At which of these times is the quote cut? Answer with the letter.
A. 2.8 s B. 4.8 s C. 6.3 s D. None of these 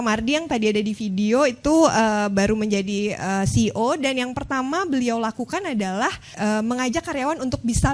C